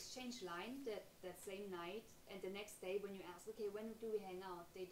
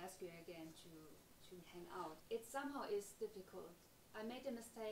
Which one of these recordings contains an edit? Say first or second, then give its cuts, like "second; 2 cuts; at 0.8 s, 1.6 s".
second; 1 cut; at 2.2 s